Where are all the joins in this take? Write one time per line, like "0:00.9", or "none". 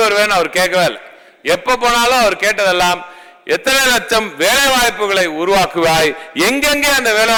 none